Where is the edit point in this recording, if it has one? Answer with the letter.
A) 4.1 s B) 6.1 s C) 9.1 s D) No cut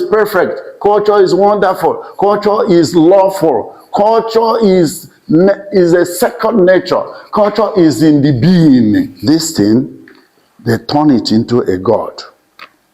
C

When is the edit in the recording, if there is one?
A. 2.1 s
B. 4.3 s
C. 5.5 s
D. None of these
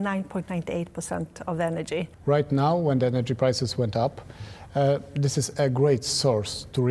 A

